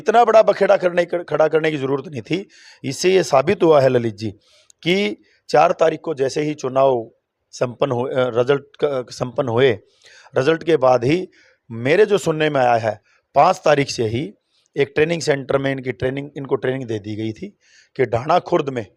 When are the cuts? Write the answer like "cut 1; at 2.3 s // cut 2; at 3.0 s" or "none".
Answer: none